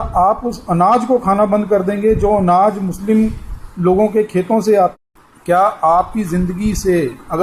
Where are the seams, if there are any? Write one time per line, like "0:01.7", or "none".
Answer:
0:04.9

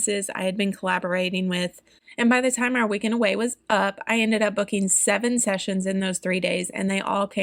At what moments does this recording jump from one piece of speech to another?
0:01.8

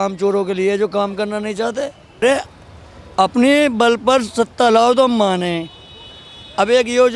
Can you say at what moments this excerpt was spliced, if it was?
0:02.2

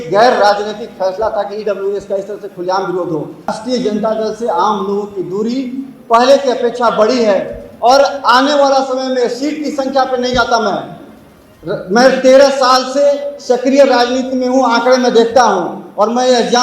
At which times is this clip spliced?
0:03.5

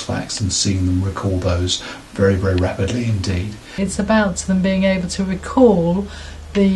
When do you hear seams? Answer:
0:03.8

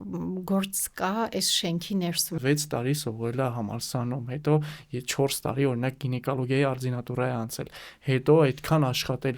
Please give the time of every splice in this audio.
0:02.4

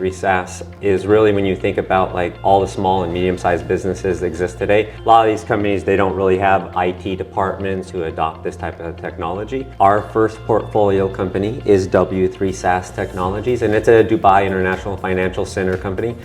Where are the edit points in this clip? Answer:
0:02.3
0:04.9
0:06.7
0:07.9
0:09.6

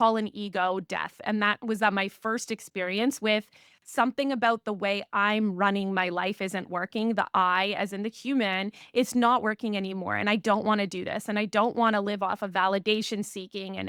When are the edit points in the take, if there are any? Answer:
none

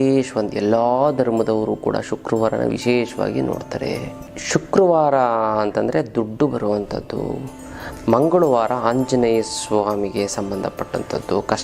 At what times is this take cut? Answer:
0:04.3

